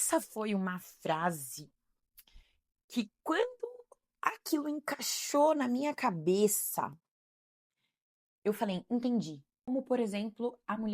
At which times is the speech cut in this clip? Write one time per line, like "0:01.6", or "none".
0:09.7